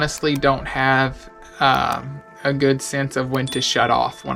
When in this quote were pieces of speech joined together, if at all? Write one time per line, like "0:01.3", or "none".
none